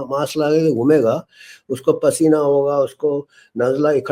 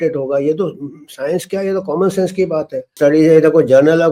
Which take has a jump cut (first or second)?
second